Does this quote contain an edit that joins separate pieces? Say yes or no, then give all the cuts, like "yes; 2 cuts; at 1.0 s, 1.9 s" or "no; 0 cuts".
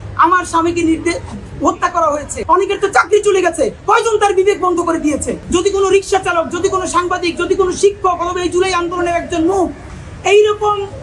yes; 2 cuts; at 2.4 s, 5.3 s